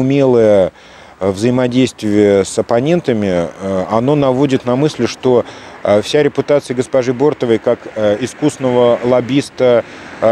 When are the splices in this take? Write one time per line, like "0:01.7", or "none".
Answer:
none